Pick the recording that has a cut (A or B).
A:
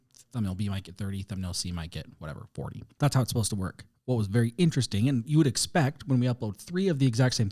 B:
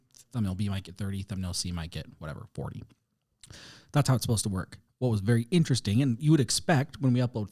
A